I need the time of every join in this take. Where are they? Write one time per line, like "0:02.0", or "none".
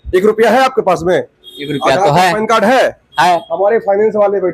none